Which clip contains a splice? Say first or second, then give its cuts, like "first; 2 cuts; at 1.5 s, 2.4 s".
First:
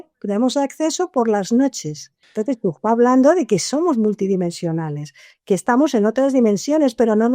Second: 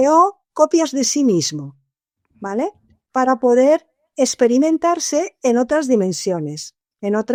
first; 1 cut; at 2.2 s